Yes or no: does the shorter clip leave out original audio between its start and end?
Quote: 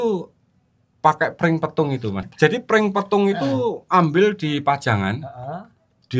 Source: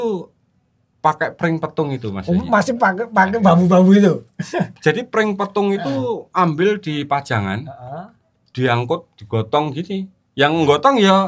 yes